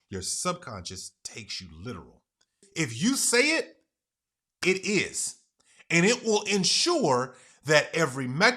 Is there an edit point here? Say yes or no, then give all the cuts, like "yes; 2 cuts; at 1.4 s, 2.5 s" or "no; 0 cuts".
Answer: yes; 1 cut; at 2.6 s